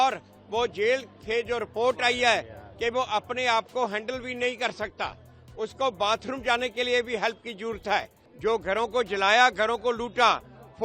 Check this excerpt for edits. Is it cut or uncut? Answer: cut